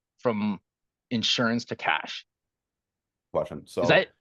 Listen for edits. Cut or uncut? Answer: uncut